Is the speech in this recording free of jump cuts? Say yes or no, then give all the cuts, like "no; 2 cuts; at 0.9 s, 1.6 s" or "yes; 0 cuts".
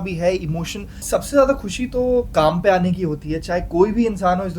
no; 1 cut; at 1.0 s